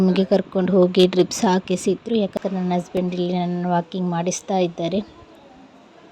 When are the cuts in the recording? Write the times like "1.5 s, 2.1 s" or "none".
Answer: 2.3 s